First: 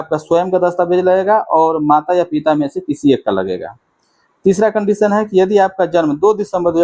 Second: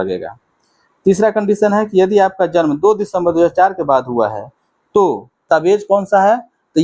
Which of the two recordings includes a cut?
second; 1 cut; at 5.4 s

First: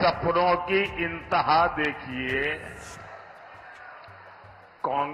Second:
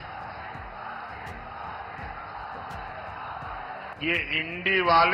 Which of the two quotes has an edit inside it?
second; 1 cut; at 3.9 s

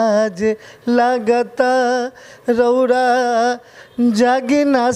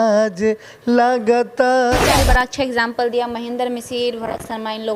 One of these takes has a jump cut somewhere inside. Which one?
second; 1 cut; at 2.1 s

